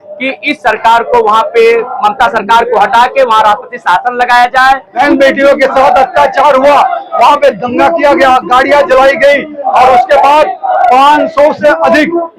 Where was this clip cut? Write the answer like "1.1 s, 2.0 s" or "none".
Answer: 4.9 s